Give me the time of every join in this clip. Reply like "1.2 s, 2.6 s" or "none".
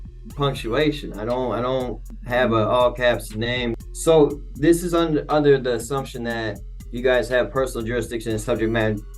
2.1 s, 3.8 s